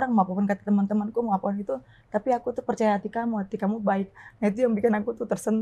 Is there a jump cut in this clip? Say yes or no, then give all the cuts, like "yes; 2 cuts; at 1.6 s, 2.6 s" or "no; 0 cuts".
no; 0 cuts